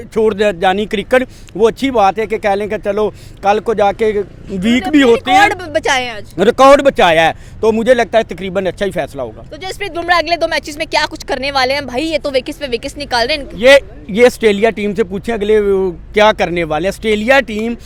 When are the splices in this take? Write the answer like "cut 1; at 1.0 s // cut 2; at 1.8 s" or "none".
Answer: none